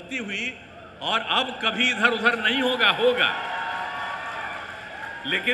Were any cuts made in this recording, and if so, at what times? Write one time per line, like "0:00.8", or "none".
none